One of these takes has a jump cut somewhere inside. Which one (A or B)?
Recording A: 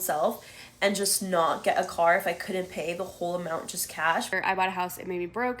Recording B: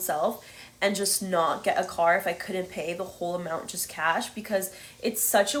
A